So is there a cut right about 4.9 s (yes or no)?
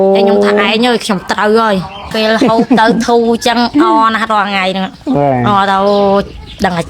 no